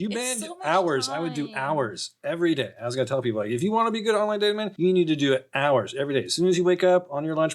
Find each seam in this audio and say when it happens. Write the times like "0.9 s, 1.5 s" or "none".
none

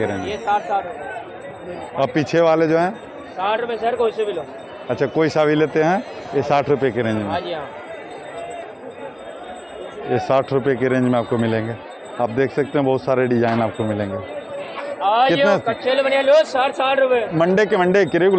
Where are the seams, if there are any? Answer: none

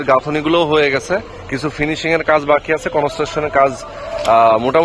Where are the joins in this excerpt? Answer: none

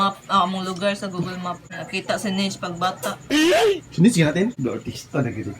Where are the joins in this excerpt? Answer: 1.7 s, 4.6 s

